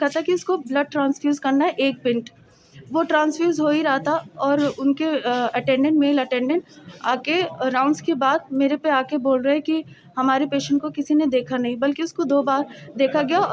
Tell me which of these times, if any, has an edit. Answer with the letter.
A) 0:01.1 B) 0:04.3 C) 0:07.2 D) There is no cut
D